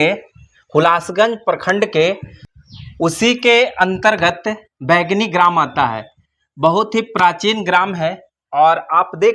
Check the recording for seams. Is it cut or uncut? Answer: uncut